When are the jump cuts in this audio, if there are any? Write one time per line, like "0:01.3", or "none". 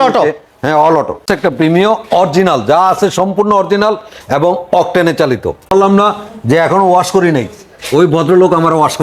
0:01.2
0:05.7